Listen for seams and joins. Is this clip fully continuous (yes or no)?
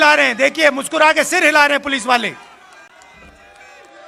yes